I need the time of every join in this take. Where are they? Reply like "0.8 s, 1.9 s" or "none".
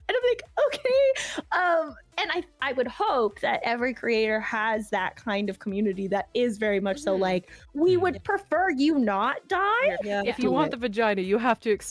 10.2 s